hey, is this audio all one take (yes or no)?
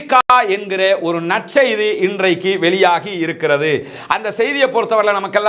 yes